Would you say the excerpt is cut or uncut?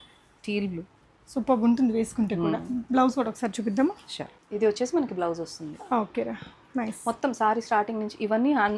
uncut